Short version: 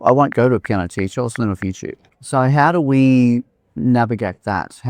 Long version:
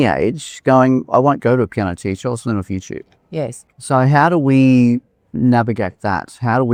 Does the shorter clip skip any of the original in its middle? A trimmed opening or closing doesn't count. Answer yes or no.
yes